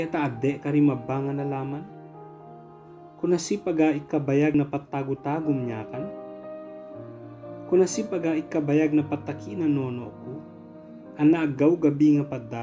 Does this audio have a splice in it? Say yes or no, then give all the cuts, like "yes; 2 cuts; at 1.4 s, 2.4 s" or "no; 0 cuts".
no; 0 cuts